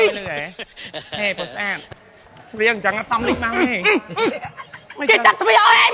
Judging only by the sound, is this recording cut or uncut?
uncut